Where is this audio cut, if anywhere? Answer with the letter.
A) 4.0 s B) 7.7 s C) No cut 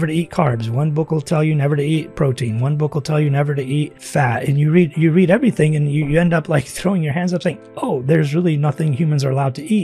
A